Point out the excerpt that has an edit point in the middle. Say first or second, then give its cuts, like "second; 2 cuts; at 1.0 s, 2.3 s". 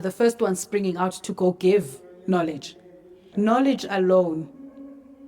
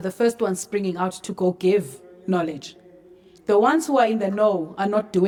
first; 1 cut; at 3.3 s